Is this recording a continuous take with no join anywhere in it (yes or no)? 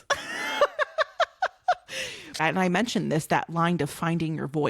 no